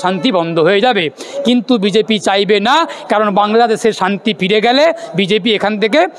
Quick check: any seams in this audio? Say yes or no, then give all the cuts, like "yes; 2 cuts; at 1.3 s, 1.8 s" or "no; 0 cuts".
no; 0 cuts